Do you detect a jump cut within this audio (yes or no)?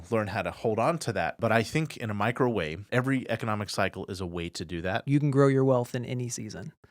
yes